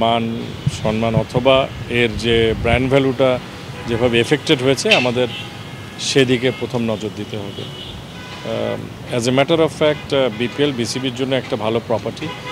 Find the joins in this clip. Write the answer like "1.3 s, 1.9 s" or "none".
none